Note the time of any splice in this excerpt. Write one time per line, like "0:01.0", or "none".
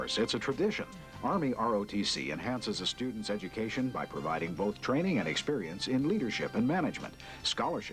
none

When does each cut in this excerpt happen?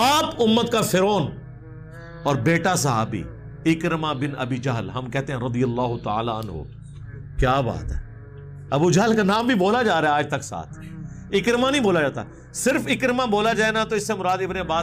none

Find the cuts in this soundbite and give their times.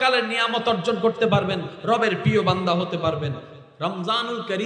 0:03.5

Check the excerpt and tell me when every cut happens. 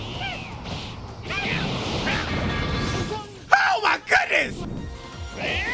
0:04.7

